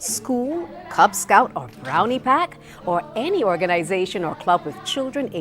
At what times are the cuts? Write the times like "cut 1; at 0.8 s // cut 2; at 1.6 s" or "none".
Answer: cut 1; at 3.0 s